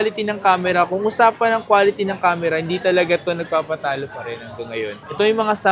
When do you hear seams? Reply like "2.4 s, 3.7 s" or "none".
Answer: none